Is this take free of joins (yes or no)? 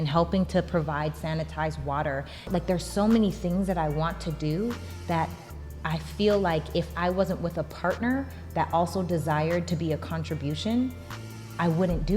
no